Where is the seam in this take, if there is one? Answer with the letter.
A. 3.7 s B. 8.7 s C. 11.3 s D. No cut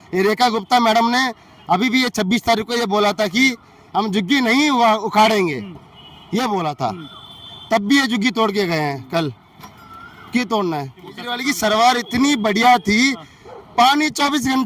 C